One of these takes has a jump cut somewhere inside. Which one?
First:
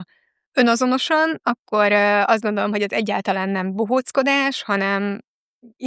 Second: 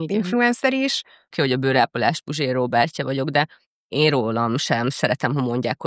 second; 1 cut; at 1.3 s

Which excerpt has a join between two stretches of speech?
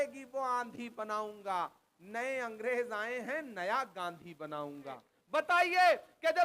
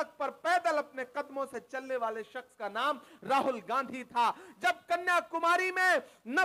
first; 1 cut; at 5.1 s

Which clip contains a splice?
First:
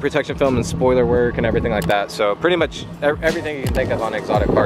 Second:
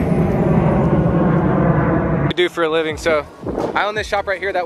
second; 1 cut; at 2.3 s

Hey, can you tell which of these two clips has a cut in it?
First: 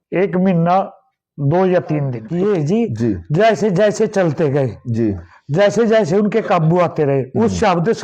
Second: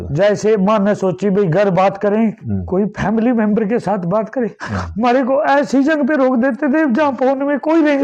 first; 1 cut; at 2.2 s

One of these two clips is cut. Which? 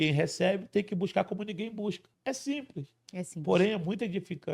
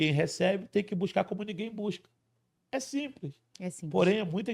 first; 1 cut; at 2.1 s

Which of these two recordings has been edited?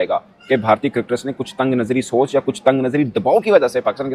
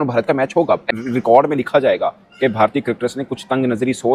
second; 1 cut; at 0.9 s

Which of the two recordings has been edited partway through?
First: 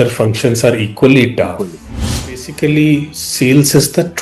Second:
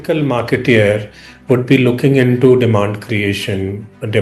first; 1 cut; at 1.9 s

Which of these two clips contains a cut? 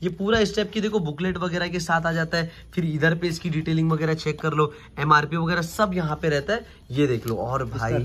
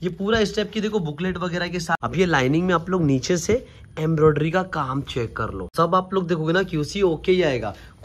second; 2 cuts; at 2.0 s, 5.7 s

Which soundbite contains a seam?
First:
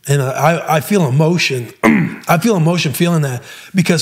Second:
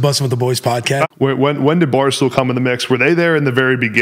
second; 1 cut; at 1.0 s

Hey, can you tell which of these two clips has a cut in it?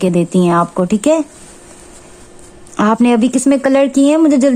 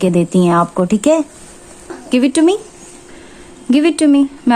second; 1 cut; at 2.0 s

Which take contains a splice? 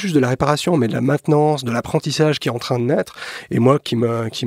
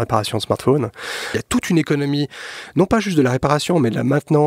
second; 1 cut; at 1.4 s

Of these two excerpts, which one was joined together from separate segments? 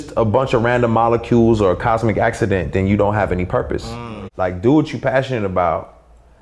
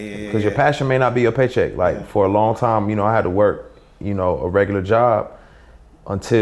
first; 1 cut; at 3.9 s

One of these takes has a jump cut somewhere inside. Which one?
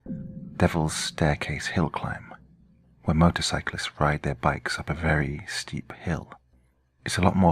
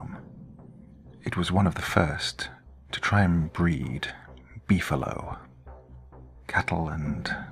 first; 1 cut; at 6.3 s

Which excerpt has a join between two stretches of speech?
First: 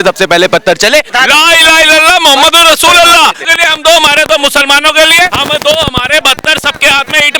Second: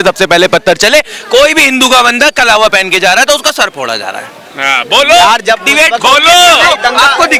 first; 2 cuts; at 1.1 s, 3.4 s

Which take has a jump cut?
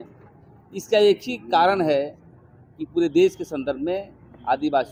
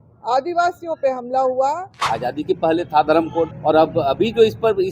second; 2 cuts; at 1.9 s, 3.6 s

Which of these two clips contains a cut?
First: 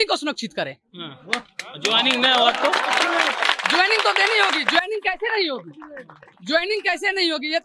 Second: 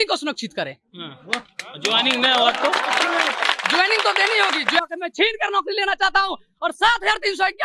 second; 1 cut; at 4.9 s

